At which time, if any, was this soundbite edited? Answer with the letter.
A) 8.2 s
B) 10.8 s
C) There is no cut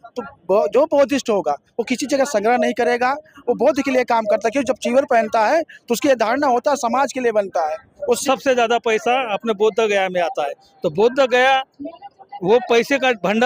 A